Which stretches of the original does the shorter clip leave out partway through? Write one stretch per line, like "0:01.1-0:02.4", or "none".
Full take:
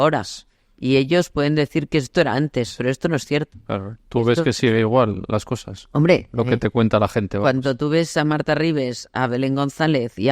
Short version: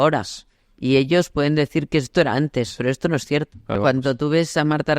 0:03.7-0:07.3